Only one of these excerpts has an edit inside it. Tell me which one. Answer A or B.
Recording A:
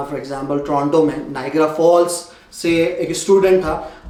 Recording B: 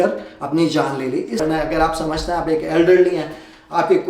B